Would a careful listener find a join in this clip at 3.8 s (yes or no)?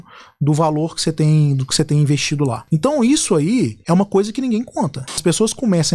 yes